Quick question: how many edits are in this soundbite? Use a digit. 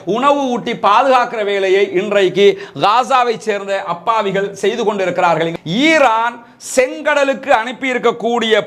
1